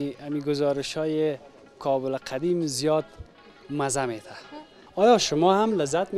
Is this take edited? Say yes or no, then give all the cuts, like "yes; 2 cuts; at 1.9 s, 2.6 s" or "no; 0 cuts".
yes; 1 cut; at 4.8 s